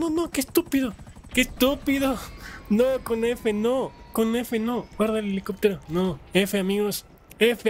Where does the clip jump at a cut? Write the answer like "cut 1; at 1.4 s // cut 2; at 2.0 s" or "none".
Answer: none